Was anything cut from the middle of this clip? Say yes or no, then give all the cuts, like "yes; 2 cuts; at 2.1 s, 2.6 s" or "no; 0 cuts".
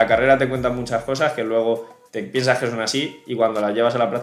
no; 0 cuts